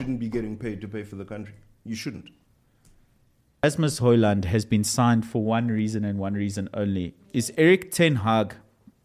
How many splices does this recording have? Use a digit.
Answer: 1